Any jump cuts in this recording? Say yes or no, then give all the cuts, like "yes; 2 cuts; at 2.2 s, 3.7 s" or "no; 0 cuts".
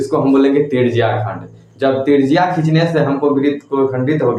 no; 0 cuts